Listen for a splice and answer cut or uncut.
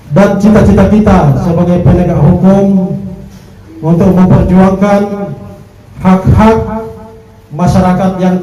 uncut